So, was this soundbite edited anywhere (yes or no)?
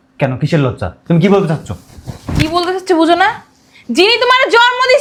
no